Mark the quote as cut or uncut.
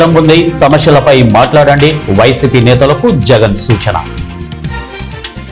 cut